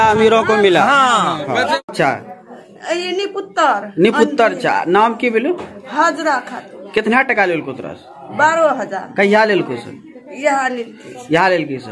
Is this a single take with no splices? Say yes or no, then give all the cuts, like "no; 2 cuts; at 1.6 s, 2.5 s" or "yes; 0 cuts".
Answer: no; 1 cut; at 1.9 s